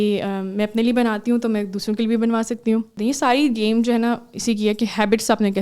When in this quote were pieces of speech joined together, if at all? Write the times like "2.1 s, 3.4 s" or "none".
2.9 s